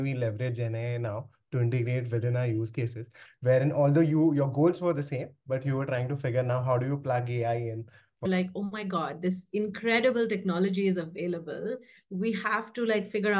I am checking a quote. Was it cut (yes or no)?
yes